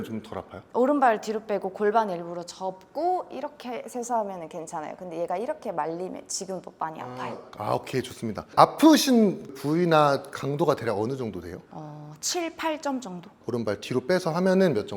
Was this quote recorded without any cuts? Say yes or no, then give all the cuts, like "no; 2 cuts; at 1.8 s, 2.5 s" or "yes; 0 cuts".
yes; 0 cuts